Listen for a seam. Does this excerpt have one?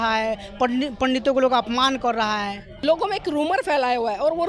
yes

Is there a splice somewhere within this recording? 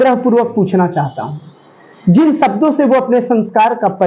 no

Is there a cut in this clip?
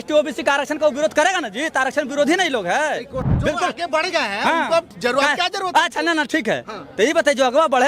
yes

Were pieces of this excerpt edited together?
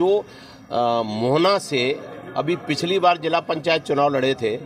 no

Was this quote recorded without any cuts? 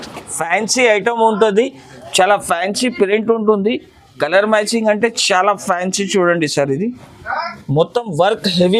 yes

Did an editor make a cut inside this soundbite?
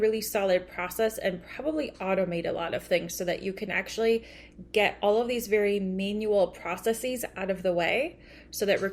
no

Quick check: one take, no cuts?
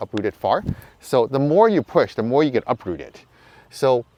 yes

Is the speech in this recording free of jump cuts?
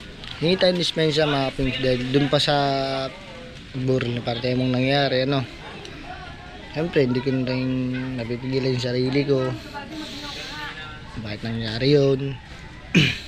yes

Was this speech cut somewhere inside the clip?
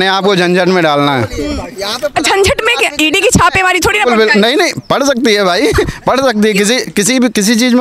no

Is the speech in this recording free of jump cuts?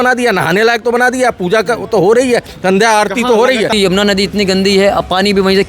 no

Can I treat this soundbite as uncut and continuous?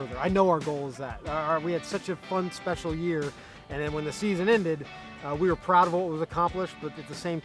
yes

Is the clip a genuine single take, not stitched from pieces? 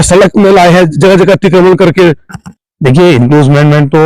yes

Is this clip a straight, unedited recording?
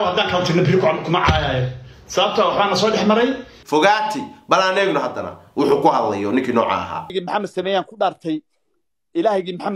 no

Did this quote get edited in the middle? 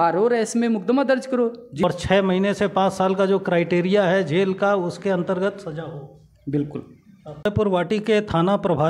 yes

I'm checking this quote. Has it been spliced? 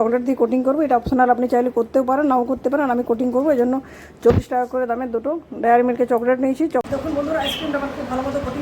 yes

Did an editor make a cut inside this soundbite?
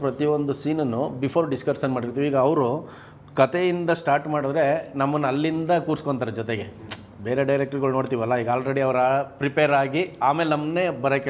no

